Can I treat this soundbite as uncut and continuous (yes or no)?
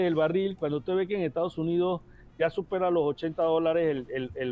yes